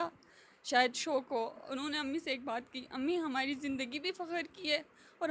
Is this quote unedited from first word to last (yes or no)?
no